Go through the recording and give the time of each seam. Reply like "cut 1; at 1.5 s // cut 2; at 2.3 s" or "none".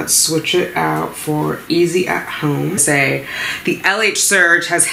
cut 1; at 2.8 s